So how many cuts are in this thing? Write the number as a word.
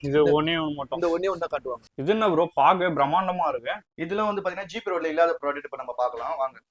one